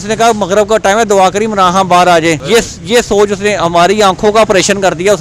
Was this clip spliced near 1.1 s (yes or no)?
no